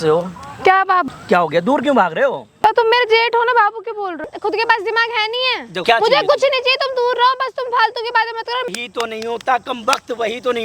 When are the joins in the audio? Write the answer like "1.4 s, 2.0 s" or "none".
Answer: 1.1 s, 2.5 s, 4.2 s, 5.8 s, 8.7 s